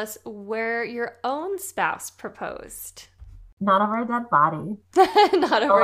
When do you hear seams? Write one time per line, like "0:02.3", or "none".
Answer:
0:03.5